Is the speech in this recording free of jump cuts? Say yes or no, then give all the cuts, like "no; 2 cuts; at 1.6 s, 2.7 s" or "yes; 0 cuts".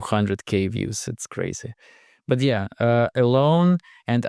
yes; 0 cuts